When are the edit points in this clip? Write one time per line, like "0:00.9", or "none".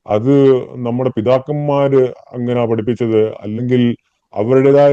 none